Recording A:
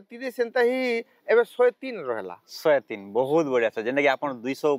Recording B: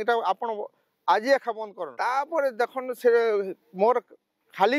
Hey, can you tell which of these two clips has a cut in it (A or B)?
B